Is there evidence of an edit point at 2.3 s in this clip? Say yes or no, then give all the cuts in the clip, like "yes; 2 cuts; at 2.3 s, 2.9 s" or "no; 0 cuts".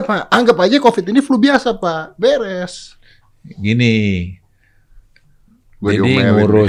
no; 0 cuts